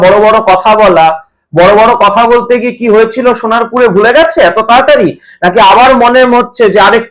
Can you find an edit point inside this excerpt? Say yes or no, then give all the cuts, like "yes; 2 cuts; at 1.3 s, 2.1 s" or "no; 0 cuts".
no; 0 cuts